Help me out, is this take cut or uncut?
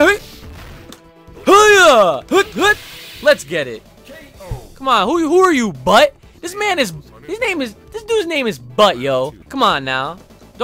cut